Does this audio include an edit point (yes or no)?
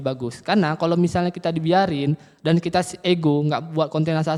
no